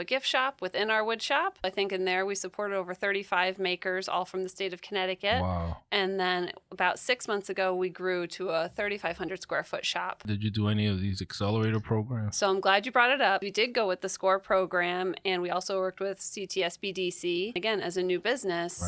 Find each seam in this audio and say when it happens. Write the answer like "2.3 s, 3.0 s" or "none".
1.7 s, 10.3 s, 13.5 s, 17.6 s